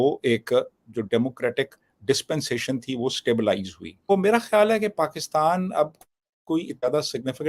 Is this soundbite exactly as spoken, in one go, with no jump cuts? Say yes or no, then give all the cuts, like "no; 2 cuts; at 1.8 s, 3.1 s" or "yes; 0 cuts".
no; 1 cut; at 4.1 s